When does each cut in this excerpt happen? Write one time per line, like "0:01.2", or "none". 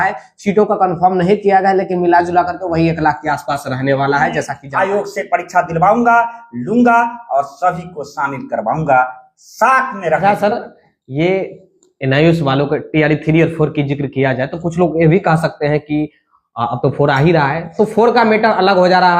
0:04.6